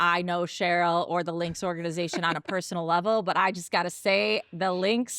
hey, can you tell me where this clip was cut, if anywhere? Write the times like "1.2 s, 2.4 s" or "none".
none